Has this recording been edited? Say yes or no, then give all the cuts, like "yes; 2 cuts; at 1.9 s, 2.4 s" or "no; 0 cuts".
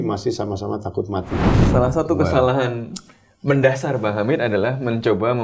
yes; 1 cut; at 1.6 s